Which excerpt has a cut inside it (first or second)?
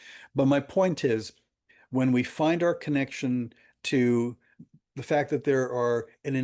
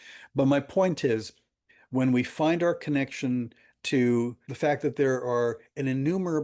second